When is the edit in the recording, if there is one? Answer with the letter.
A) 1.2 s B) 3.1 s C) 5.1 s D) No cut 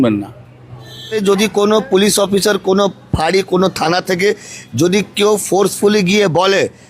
A